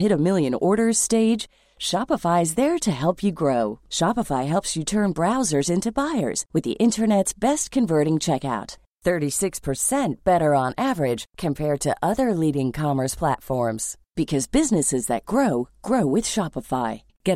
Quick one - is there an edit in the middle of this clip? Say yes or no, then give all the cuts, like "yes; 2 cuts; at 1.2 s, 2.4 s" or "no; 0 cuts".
no; 0 cuts